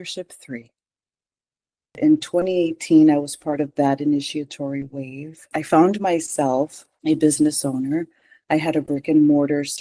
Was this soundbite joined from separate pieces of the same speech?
yes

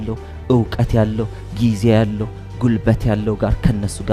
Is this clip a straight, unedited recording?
yes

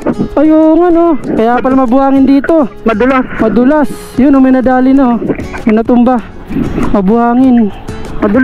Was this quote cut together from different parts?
no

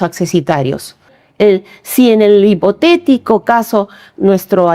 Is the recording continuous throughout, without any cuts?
no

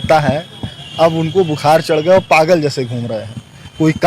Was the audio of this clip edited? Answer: no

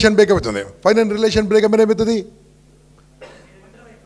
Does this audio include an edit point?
no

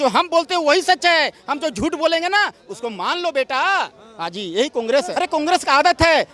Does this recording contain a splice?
yes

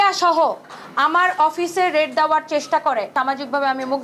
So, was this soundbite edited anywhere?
yes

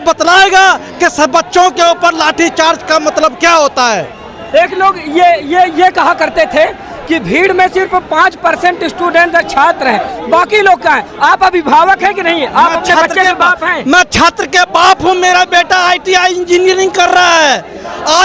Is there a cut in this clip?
no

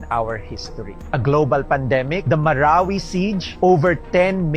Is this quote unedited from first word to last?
no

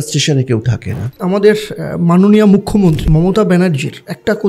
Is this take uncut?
no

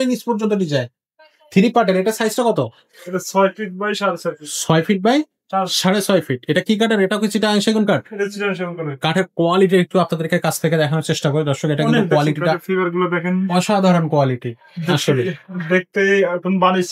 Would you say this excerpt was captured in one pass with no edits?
yes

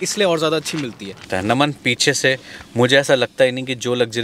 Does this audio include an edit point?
yes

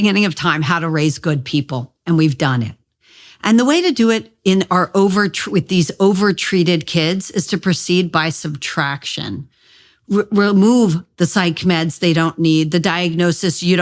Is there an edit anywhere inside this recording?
no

